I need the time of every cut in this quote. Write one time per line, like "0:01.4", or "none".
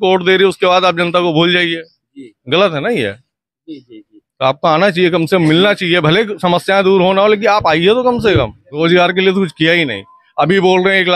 0:08.6